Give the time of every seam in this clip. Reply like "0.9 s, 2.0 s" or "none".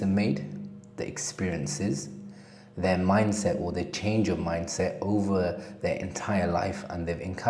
none